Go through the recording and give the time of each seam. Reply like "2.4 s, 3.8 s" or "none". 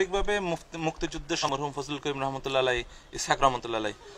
1.4 s